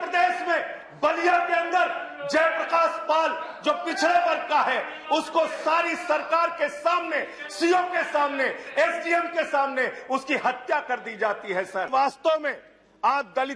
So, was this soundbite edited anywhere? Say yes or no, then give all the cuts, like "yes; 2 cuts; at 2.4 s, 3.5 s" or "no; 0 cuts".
yes; 1 cut; at 11.9 s